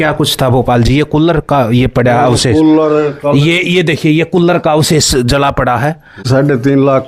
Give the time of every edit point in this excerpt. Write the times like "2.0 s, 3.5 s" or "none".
6.1 s